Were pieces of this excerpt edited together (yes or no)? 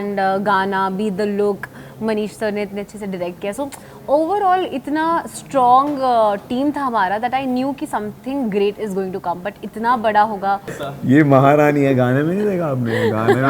yes